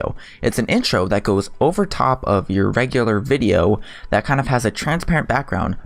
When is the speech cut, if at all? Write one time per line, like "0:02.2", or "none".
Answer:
0:04.1